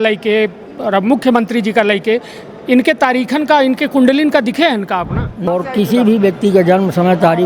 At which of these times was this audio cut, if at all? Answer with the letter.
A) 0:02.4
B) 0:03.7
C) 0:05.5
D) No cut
C